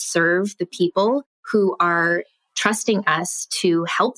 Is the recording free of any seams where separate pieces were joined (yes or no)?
no